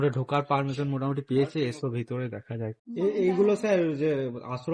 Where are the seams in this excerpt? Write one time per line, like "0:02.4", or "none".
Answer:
0:02.8